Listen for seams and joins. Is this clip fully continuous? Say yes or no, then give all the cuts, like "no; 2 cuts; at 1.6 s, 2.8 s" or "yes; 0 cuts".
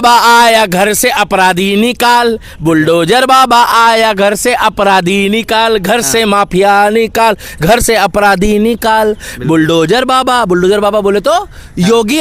yes; 0 cuts